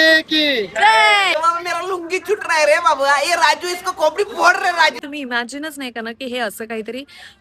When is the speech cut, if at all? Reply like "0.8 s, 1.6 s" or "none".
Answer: 1.4 s, 5.0 s